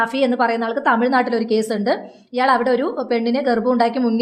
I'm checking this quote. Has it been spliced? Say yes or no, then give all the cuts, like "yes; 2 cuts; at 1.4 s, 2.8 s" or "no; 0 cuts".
no; 0 cuts